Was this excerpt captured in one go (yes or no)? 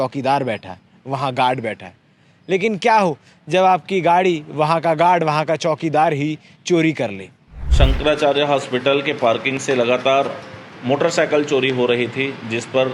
no